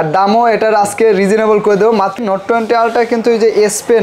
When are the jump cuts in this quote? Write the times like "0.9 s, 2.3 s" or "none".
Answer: 2.2 s